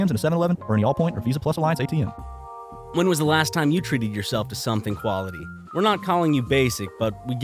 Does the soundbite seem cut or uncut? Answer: cut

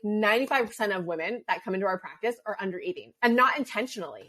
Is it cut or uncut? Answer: uncut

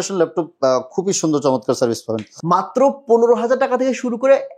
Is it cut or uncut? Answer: cut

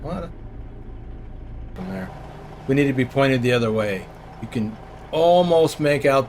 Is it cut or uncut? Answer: cut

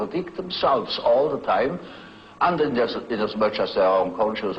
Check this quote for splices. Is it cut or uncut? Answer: uncut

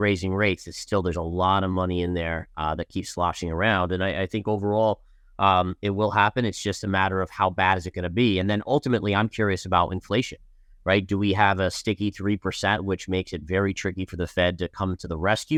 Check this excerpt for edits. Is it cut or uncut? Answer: uncut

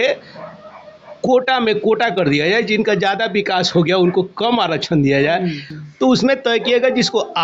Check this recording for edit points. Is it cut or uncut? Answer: cut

